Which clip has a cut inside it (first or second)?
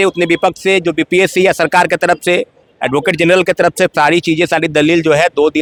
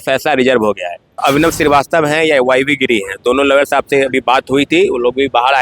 second